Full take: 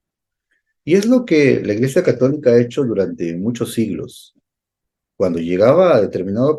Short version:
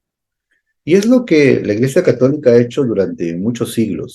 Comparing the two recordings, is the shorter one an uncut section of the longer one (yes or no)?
yes